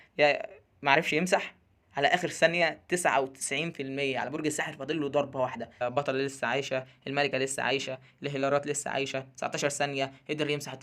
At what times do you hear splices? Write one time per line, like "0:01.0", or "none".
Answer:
0:05.7